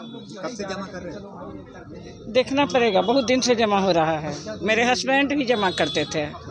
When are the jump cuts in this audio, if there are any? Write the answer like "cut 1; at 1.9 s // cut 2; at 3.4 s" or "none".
none